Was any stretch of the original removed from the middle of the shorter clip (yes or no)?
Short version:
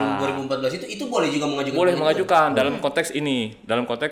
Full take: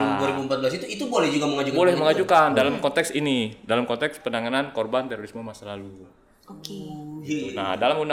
no